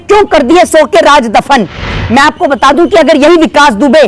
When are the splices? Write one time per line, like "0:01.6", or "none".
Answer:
0:01.9